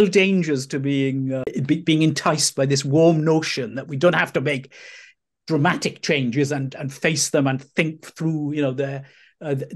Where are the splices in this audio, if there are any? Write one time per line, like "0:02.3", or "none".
0:01.5